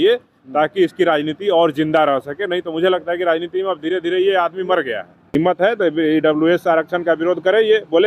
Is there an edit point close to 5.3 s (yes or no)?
yes